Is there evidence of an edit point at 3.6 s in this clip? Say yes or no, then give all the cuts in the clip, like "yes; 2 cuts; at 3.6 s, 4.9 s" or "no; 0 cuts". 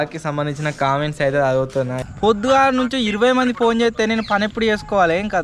no; 1 cut; at 2.0 s